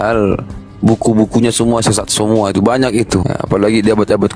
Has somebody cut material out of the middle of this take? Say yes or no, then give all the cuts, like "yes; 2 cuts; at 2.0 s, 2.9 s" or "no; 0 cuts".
yes; 1 cut; at 3.3 s